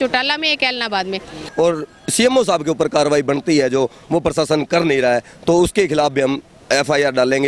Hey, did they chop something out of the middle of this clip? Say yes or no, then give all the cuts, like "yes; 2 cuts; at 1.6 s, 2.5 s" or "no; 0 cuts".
yes; 1 cut; at 1.4 s